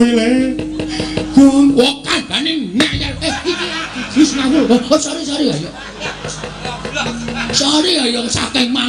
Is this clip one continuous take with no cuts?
yes; 0 cuts

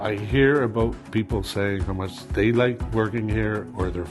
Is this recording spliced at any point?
yes; 2 cuts; at 2.2 s, 2.8 s

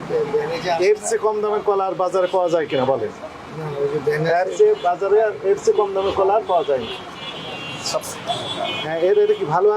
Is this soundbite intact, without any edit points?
no; 1 cut; at 8.1 s

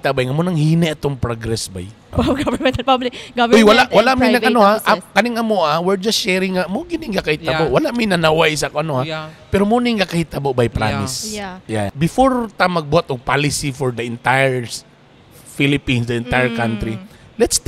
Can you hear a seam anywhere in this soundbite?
yes; 2 cuts; at 2.1 s, 11.9 s

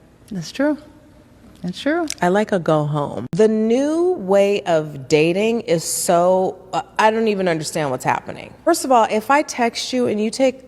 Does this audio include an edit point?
yes; 2 cuts; at 3.0 s, 8.7 s

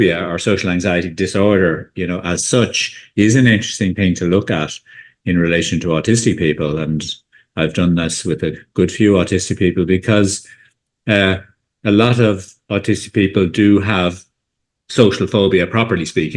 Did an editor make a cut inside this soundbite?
no; 0 cuts

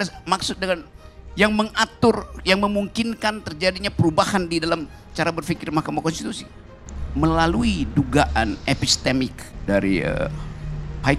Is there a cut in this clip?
yes; 1 cut; at 9.5 s

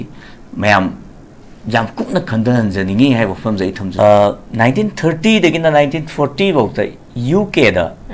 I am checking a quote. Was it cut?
yes; 1 cut; at 3.8 s

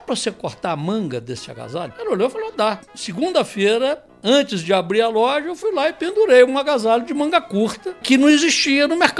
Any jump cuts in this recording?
yes; 3 cuts; at 1.9 s, 2.9 s, 7.9 s

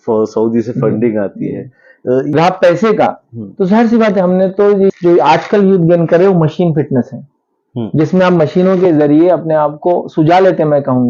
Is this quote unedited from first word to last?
no; 2 cuts; at 2.3 s, 5.0 s

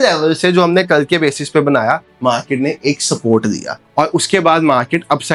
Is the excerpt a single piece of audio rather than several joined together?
yes; 0 cuts

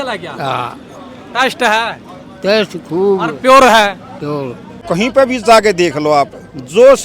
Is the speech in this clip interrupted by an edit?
yes; 1 cut; at 4.8 s

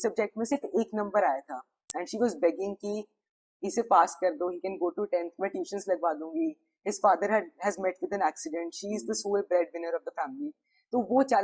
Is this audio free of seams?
yes; 0 cuts

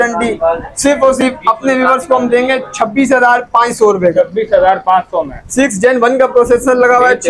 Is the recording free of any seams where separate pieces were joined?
yes; 0 cuts

